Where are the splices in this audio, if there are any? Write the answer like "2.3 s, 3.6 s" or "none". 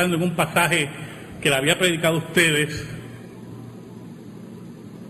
none